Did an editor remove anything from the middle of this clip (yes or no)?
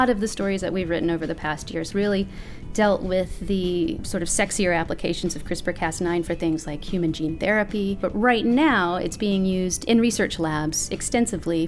yes